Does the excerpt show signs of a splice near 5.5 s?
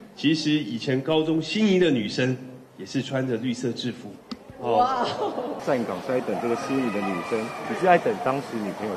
yes; 1 cut; at 5.5 s

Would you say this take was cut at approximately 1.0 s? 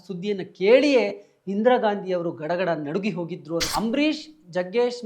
no; 1 cut; at 3.7 s

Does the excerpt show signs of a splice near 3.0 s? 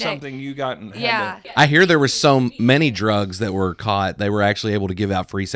no; 1 cut; at 1.5 s

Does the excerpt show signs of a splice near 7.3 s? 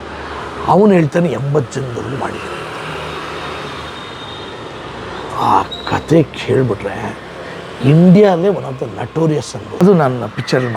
no; 1 cut; at 9.8 s

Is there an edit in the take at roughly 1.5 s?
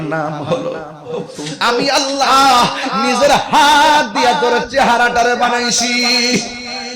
yes; 1 cut; at 1.5 s

